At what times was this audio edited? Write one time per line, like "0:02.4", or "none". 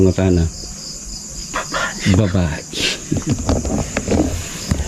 none